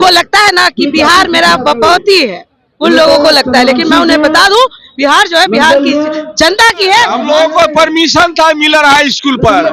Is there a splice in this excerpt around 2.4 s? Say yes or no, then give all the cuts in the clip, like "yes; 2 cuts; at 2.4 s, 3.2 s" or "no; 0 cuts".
no; 1 cut; at 7.2 s